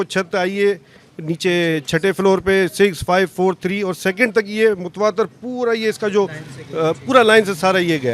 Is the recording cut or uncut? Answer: uncut